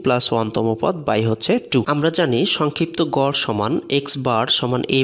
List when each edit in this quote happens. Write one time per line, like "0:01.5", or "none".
0:01.9